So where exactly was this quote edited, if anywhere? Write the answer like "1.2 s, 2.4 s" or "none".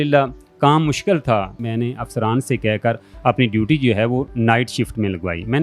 1.6 s